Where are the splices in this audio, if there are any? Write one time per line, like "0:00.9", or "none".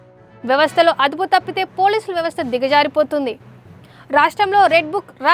none